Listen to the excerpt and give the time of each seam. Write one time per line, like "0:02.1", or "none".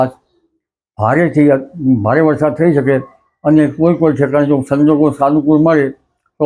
none